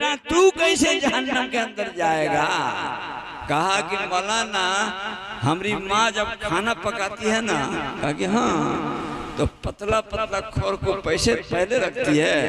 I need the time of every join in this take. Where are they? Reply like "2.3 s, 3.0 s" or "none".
none